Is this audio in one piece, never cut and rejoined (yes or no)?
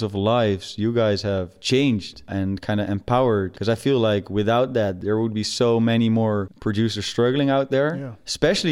no